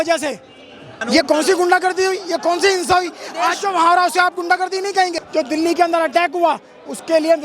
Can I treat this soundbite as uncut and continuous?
no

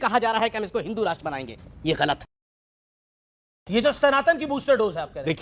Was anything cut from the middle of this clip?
no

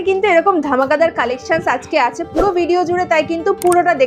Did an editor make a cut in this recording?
no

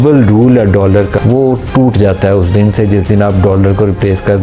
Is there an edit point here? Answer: yes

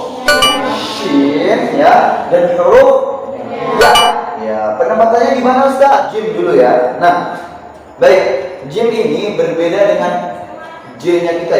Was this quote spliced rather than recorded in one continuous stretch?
yes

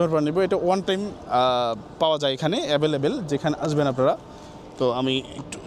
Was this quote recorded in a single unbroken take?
yes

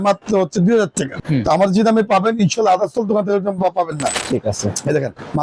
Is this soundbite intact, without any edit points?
no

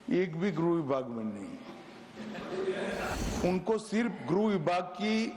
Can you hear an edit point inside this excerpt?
yes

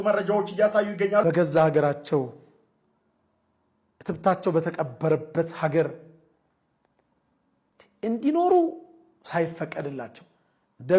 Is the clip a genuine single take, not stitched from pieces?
no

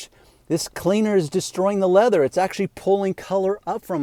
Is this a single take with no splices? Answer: yes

